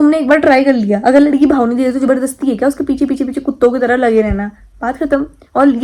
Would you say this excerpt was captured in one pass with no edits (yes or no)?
yes